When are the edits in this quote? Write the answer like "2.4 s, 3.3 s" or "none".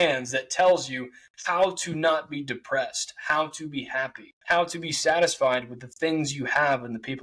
4.3 s